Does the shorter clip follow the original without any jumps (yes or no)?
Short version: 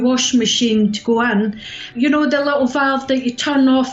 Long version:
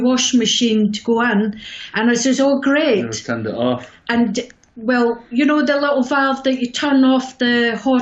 no